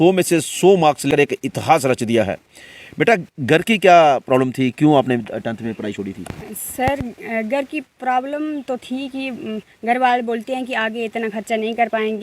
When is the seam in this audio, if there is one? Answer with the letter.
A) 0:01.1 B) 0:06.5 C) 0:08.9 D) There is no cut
A